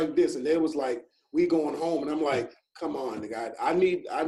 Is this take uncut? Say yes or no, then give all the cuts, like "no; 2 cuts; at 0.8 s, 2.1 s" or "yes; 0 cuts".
yes; 0 cuts